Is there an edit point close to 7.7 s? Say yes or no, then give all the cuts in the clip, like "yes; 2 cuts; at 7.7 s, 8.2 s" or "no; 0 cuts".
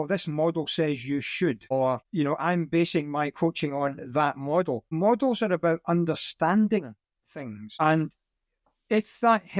yes; 3 cuts; at 2.0 s, 4.9 s, 7.7 s